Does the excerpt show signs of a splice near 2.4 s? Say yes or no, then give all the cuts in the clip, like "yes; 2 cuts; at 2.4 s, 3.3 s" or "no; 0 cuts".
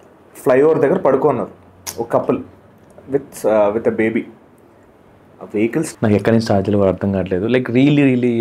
no; 1 cut; at 5.9 s